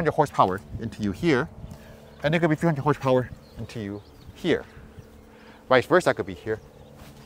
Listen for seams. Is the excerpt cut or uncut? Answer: uncut